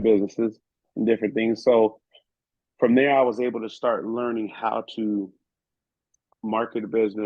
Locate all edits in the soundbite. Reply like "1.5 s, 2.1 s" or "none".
none